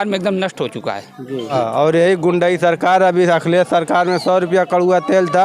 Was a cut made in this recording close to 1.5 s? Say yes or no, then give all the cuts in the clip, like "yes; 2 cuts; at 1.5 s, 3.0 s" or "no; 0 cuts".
yes; 1 cut; at 1.5 s